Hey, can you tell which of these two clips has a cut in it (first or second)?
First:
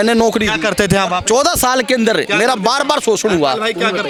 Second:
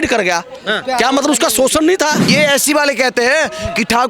second